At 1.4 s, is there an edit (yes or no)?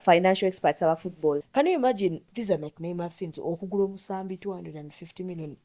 yes